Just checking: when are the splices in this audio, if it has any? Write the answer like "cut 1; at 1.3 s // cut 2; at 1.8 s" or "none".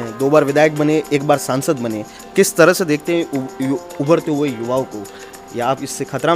none

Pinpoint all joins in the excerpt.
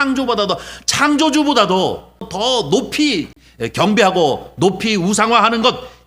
cut 1; at 2.3 s // cut 2; at 3.4 s

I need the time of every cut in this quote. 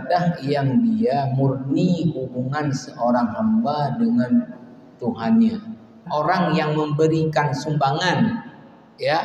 cut 1; at 6.1 s

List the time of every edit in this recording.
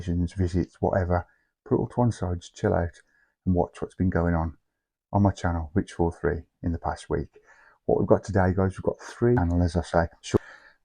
cut 1; at 9.4 s

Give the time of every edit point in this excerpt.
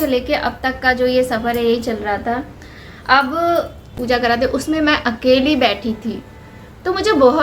cut 1; at 3.9 s

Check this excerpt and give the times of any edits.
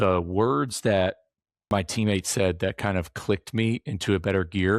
cut 1; at 1.7 s

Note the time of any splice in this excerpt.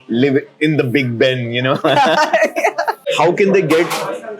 cut 1; at 3.0 s

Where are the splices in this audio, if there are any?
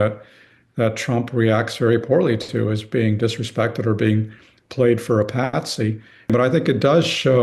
cut 1; at 6.3 s

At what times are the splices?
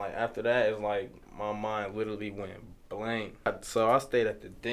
cut 1; at 3.5 s

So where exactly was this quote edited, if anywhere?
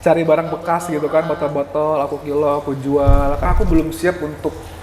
cut 1; at 3.4 s

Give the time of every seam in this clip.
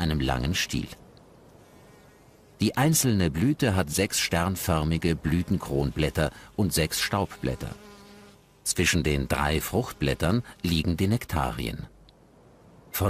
cut 1; at 10.5 s

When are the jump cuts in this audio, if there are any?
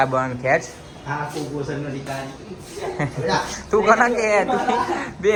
none

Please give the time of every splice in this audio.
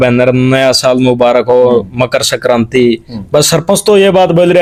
none

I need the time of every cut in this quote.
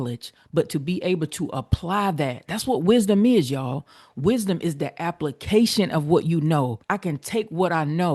cut 1; at 6.8 s

